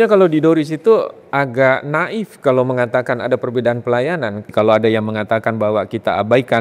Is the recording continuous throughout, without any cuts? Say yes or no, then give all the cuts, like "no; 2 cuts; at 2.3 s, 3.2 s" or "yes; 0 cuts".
no; 1 cut; at 4.4 s